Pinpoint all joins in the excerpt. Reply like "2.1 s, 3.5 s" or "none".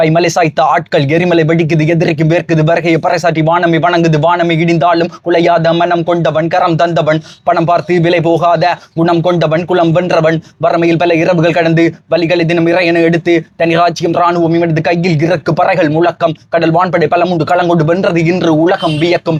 none